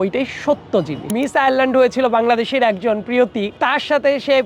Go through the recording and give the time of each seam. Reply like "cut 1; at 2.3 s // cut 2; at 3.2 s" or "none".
cut 1; at 1.1 s // cut 2; at 3.5 s